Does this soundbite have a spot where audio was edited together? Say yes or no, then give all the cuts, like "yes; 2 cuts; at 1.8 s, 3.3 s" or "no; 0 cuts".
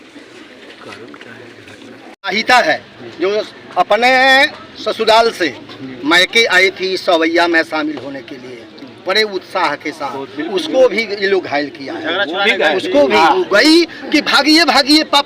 yes; 1 cut; at 2.3 s